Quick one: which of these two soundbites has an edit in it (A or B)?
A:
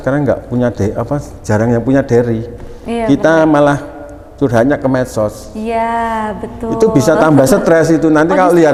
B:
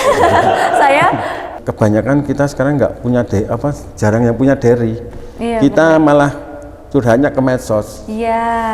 B